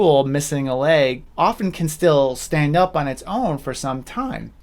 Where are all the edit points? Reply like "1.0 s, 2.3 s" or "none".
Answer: none